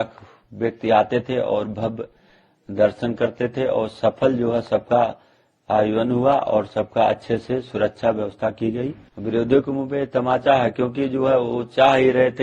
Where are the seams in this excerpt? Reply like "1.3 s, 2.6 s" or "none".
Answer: 9.1 s